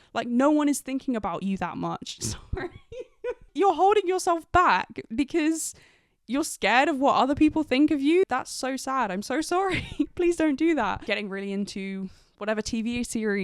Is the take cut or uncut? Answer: cut